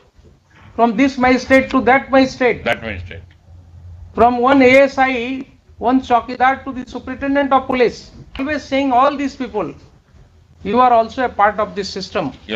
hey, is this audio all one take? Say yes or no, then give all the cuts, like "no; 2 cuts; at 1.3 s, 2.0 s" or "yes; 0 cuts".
no; 1 cut; at 8.5 s